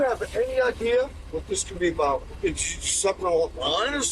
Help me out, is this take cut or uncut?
cut